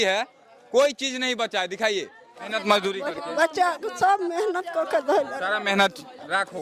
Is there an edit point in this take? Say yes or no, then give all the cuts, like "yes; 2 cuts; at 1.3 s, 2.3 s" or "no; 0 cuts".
yes; 1 cut; at 2.5 s